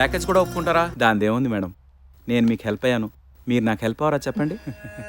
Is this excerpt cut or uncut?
cut